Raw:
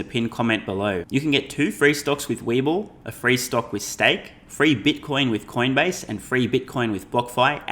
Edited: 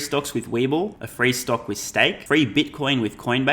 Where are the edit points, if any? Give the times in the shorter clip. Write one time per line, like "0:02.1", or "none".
0:01.0
0:02.2